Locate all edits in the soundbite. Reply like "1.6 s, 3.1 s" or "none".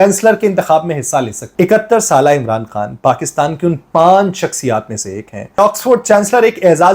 1.4 s, 5.6 s